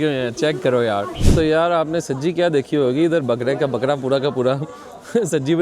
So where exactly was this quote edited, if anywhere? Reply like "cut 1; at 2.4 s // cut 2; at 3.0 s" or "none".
cut 1; at 1.2 s